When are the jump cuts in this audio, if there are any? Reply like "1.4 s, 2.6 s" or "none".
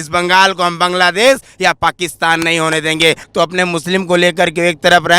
3.2 s